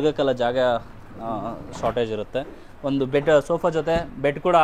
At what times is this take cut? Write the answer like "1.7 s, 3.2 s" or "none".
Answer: none